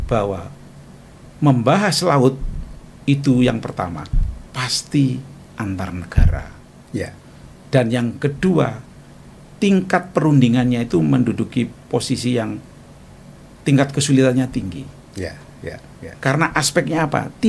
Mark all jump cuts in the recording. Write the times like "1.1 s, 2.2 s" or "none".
none